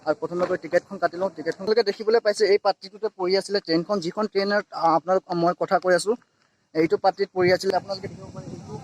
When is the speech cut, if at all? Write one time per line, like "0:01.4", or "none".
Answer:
0:01.6
0:07.7

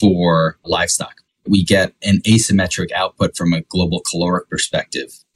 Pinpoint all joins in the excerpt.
0:00.8
0:02.0

